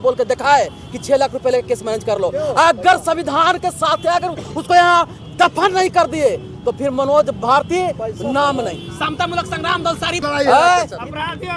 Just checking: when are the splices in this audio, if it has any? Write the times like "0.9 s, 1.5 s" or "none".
10.2 s